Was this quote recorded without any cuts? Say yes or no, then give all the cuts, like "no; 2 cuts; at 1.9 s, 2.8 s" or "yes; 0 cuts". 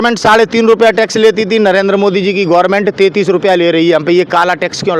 yes; 0 cuts